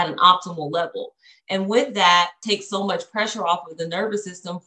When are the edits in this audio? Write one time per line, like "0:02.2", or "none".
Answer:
0:02.4